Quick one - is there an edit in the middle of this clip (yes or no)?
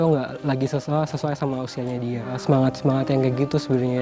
yes